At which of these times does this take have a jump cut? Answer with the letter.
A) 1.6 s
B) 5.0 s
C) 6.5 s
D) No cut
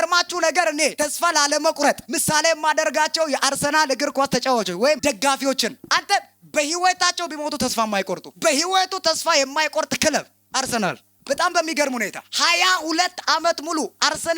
B